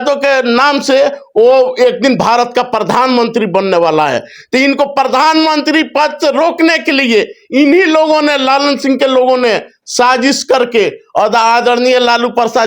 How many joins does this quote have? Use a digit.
0